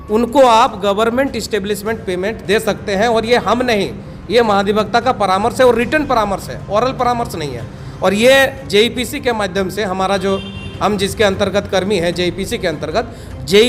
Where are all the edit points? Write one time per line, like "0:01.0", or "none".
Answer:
none